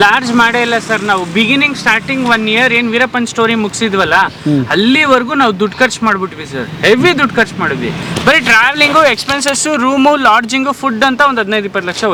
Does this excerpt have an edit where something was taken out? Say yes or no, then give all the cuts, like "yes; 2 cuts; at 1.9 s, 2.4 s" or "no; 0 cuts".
no; 0 cuts